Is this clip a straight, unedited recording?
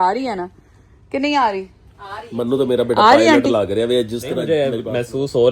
no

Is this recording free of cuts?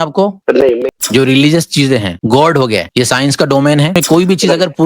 no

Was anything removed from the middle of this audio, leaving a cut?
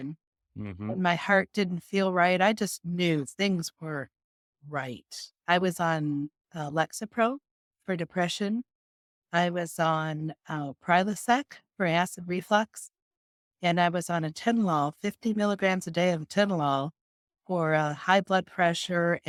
no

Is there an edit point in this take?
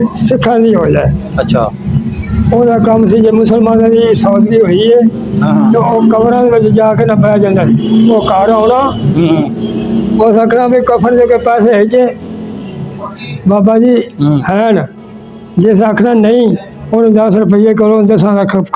no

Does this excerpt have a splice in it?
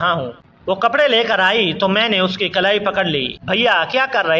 yes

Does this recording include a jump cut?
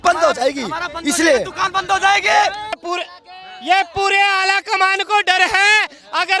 yes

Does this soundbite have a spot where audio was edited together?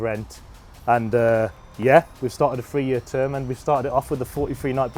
no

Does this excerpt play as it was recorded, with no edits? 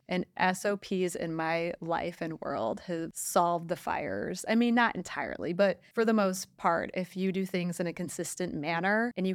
yes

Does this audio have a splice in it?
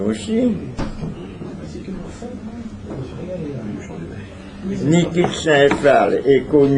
no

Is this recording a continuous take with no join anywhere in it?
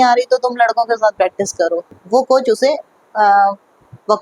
no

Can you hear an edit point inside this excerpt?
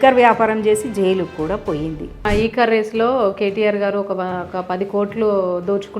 yes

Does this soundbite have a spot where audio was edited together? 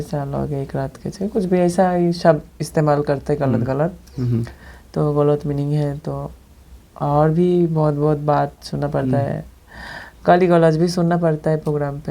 no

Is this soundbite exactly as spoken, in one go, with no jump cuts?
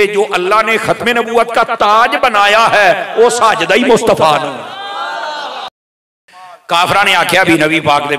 no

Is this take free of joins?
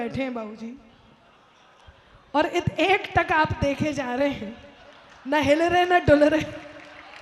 yes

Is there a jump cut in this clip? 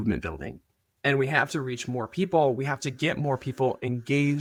no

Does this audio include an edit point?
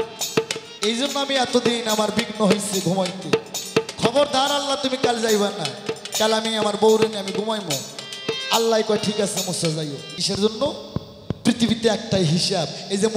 yes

